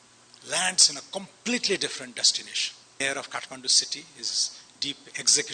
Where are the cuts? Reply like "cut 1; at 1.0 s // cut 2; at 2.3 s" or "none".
cut 1; at 3.0 s

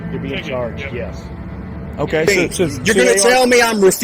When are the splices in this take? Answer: cut 1; at 2.8 s

